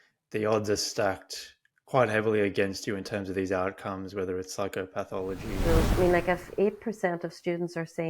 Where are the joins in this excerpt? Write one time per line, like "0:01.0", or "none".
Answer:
0:05.6